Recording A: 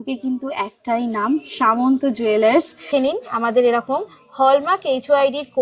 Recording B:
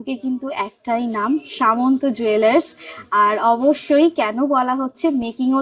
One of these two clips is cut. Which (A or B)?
A